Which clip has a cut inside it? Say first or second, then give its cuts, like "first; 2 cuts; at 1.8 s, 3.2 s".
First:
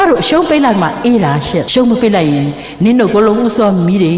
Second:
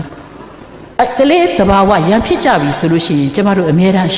first; 1 cut; at 1.7 s